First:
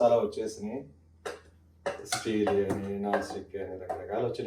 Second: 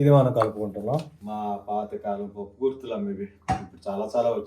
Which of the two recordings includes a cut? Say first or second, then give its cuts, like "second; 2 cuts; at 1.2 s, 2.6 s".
second; 1 cut; at 1.2 s